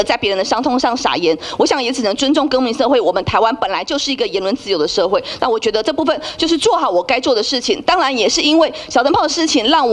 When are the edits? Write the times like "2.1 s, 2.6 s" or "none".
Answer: none